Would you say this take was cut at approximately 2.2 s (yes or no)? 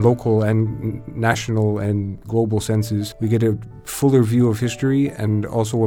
yes